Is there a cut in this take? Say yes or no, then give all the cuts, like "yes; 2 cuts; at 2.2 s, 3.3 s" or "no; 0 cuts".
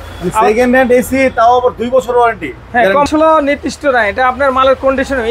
yes; 1 cut; at 3.1 s